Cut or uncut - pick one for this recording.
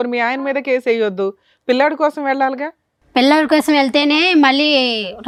uncut